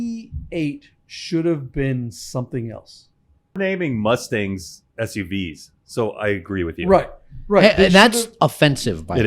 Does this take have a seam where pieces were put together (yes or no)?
yes